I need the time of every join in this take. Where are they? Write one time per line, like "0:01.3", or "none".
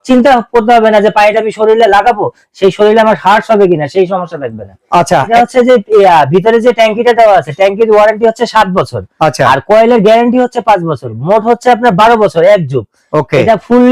0:05.3